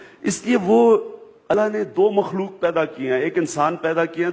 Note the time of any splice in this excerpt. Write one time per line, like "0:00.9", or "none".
0:01.5

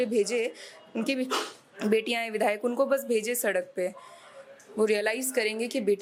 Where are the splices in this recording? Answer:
none

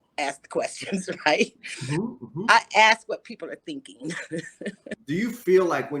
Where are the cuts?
0:04.9

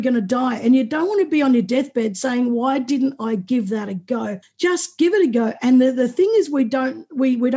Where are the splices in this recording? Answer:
0:04.4

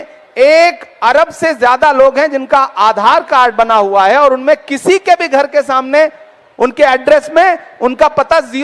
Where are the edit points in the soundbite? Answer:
none

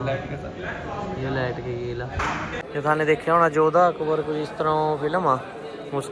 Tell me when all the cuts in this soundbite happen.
0:02.5

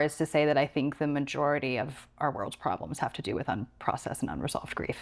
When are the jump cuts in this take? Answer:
none

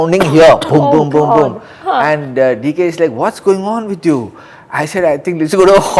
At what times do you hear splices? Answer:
none

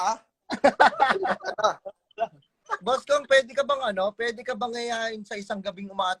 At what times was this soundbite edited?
0:02.6

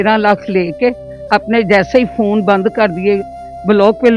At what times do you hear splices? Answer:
none

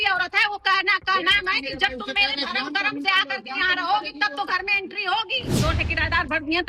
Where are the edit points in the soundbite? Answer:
0:05.5

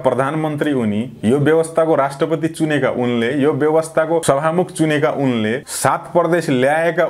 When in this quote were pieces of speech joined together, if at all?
0:04.2
0:05.7

